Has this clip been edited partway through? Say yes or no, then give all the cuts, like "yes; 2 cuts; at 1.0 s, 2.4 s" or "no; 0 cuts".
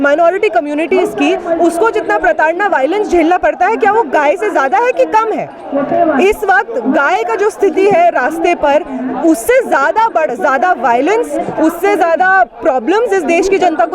no; 0 cuts